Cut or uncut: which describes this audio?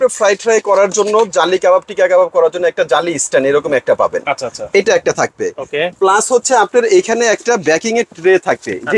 uncut